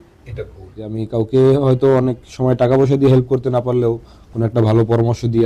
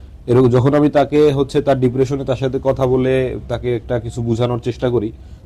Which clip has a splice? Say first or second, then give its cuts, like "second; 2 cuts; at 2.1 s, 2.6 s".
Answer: first; 1 cut; at 0.9 s